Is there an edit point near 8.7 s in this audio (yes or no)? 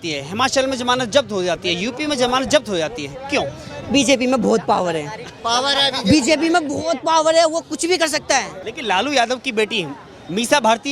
yes